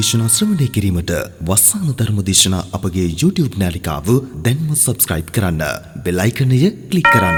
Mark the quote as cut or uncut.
uncut